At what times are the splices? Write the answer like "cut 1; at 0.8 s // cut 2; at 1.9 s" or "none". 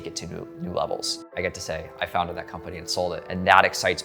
cut 1; at 1.2 s // cut 2; at 3.2 s